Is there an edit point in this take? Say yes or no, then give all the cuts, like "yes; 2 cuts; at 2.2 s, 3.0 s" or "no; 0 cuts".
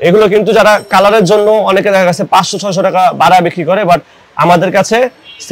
no; 0 cuts